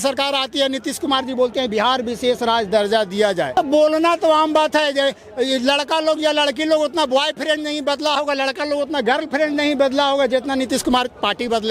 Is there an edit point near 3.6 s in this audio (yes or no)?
yes